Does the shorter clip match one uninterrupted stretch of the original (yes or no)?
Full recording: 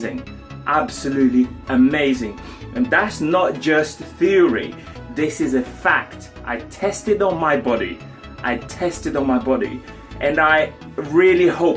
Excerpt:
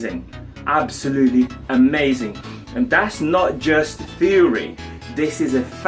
yes